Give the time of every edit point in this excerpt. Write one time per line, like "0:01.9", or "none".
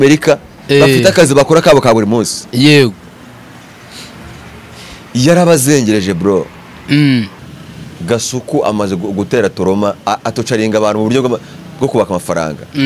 0:07.4